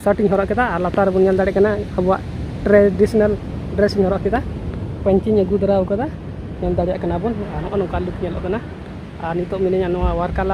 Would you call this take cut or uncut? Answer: uncut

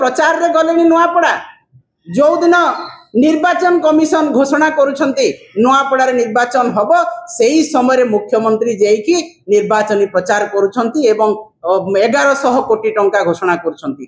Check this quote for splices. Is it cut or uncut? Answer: uncut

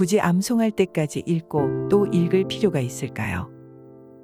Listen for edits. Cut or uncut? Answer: uncut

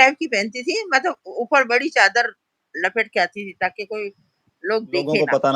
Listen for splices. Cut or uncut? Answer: uncut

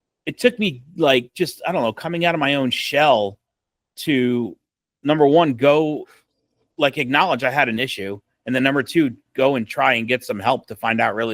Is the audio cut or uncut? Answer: uncut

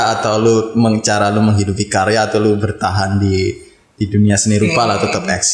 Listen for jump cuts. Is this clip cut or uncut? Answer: uncut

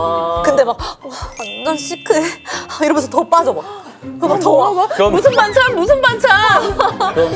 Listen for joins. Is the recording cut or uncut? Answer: uncut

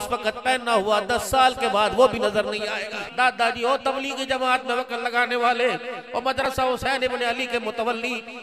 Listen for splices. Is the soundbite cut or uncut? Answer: cut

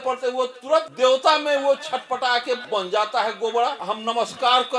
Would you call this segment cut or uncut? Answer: cut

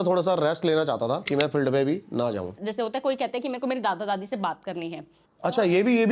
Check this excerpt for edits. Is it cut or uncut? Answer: cut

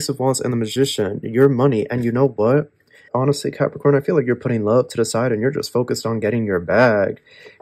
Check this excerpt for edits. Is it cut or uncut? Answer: cut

